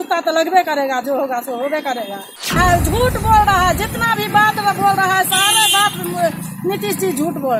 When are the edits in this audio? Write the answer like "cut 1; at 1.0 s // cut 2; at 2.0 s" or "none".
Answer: cut 1; at 2.5 s